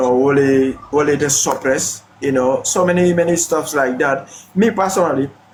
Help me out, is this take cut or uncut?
uncut